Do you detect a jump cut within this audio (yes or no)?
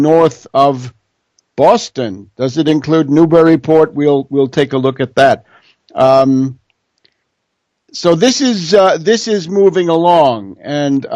yes